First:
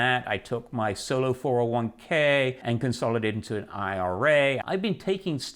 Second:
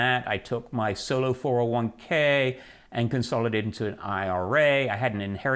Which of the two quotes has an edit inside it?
first; 2 cuts; at 2.6 s, 4.6 s

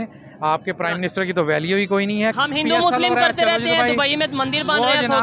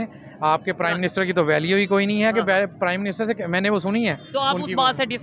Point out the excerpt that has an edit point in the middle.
first; 1 cut; at 2.3 s

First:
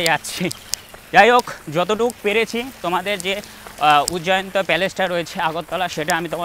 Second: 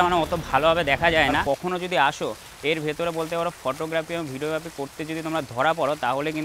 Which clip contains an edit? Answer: second; 1 cut; at 1.4 s

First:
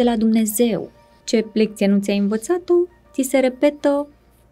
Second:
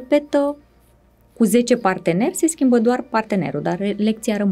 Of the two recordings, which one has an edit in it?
first; 1 cut; at 1.1 s

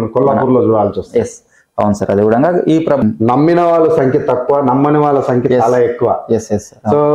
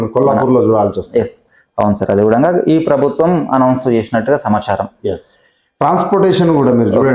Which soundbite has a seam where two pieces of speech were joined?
first; 1 cut; at 3.0 s

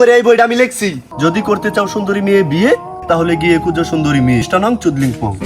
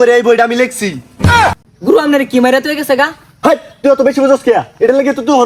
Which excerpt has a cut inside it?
first; 2 cuts; at 1.0 s, 4.5 s

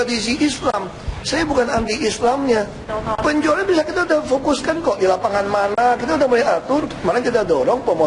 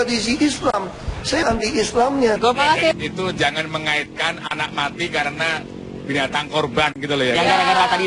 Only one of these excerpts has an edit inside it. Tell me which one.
second; 2 cuts; at 1.4 s, 2.4 s

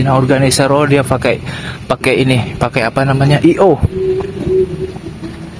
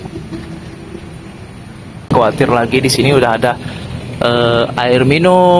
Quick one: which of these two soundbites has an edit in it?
second; 1 cut; at 2.0 s

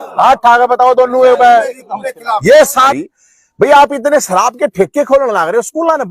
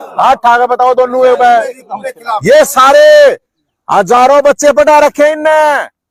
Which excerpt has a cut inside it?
first; 1 cut; at 2.9 s

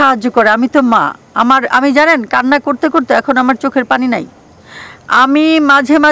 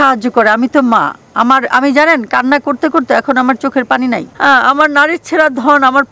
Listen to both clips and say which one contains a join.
second; 1 cut; at 4.3 s

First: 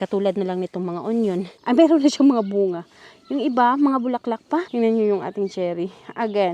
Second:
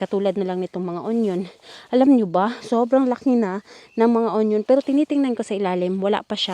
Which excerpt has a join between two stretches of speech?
first; 2 cuts; at 1.5 s, 4.7 s

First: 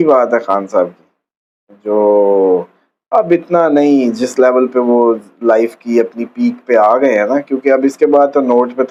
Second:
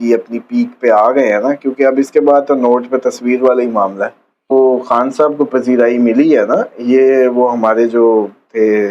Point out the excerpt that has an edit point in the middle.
second; 1 cut; at 4.5 s

